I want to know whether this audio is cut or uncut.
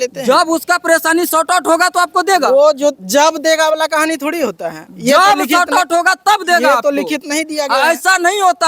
uncut